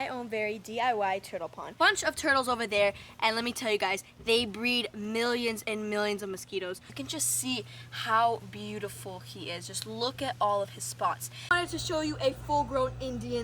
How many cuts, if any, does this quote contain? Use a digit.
3